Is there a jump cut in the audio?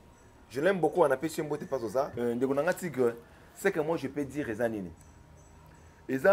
no; 0 cuts

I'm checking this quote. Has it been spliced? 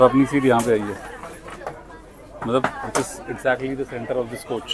no; 0 cuts

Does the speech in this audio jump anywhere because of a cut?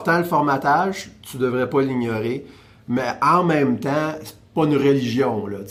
no; 0 cuts

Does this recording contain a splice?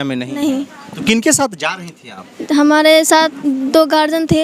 no; 0 cuts

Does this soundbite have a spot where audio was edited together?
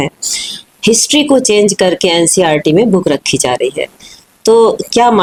no; 0 cuts

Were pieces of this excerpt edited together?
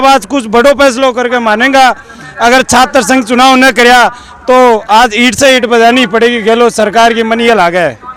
no; 0 cuts

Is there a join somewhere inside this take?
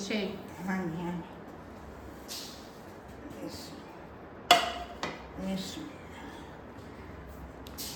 no; 0 cuts

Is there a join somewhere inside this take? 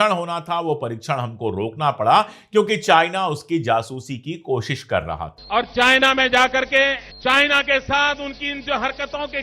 yes; 2 cuts; at 5.3 s, 7.1 s

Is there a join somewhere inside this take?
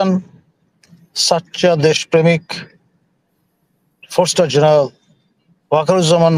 no; 0 cuts

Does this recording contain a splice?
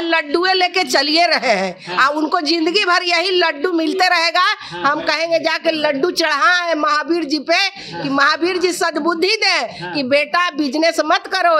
no; 0 cuts

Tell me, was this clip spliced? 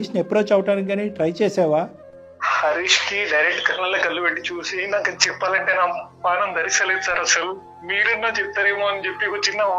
no; 0 cuts

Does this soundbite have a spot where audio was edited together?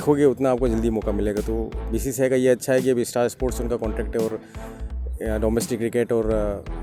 no; 0 cuts

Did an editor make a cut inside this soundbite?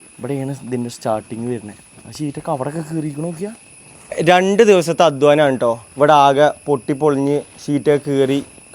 yes; 1 cut; at 4.2 s

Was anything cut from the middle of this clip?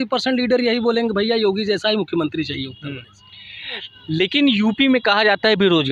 no; 0 cuts

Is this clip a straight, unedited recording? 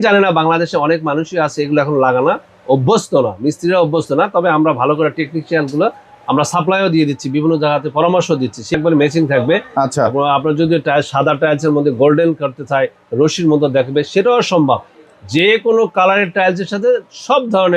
no; 1 cut; at 8.7 s

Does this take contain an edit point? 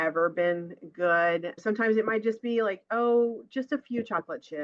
yes; 1 cut; at 1.6 s

